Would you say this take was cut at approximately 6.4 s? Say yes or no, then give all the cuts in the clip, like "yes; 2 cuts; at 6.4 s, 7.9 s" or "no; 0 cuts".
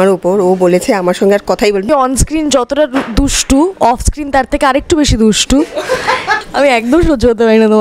yes; 2 cuts; at 1.9 s, 6.4 s